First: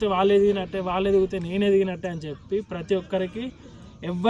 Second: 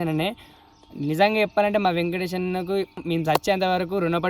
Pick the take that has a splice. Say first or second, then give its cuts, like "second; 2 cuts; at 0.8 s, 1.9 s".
second; 1 cut; at 3.0 s